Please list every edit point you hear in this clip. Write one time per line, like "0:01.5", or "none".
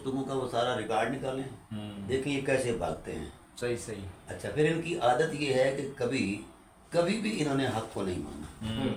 none